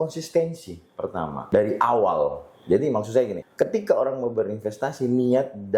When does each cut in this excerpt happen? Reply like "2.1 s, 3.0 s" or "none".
1.4 s, 3.4 s